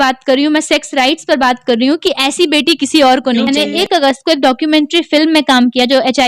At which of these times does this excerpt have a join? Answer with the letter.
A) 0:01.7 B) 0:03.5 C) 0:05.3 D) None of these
B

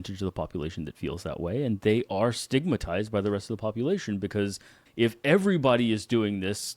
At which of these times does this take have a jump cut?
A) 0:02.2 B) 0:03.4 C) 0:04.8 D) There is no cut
C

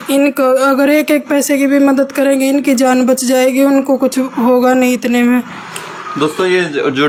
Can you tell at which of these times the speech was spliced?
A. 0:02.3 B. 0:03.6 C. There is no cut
C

